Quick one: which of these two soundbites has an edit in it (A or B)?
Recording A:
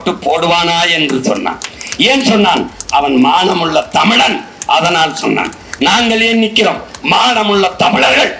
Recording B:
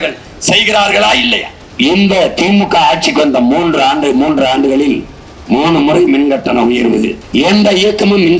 B